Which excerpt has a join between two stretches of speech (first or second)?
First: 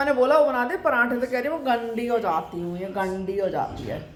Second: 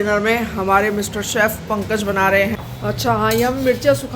second